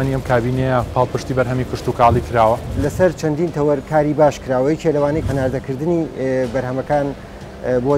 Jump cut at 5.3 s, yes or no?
yes